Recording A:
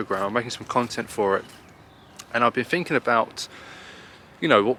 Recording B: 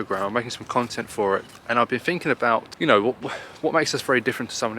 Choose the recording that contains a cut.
B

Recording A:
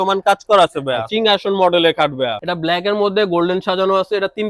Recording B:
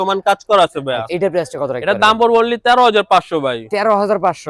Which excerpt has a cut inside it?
A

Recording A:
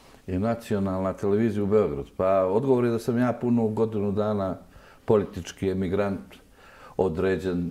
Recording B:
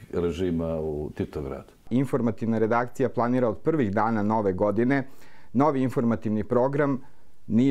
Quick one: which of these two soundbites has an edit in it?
B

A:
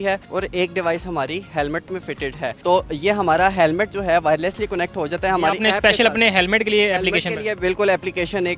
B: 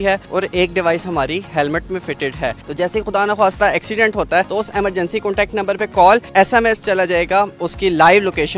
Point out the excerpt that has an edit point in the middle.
B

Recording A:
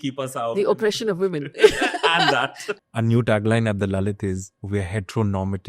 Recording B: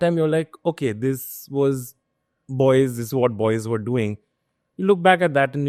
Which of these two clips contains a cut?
A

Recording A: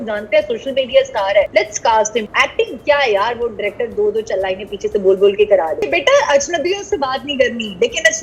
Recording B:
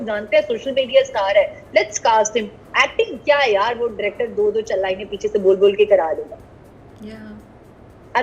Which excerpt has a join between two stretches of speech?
A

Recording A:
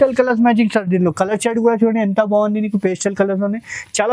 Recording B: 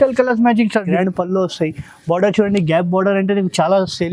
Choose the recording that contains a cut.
B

